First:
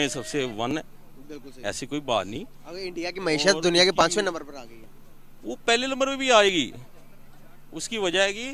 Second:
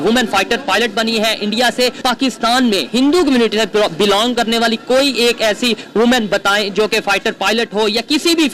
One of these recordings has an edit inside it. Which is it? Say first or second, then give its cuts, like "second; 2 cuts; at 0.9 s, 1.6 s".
second; 1 cut; at 2.0 s